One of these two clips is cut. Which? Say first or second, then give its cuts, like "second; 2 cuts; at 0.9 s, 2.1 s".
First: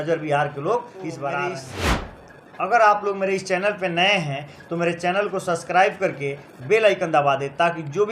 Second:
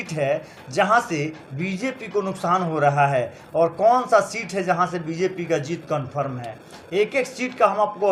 first; 1 cut; at 2.1 s